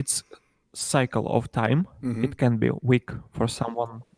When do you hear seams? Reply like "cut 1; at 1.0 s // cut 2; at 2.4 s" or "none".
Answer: cut 1; at 2.0 s